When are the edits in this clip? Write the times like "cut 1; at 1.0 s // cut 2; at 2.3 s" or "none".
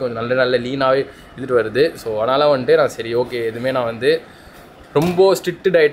none